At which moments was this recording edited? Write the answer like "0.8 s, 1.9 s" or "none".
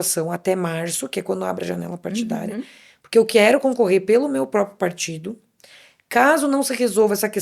none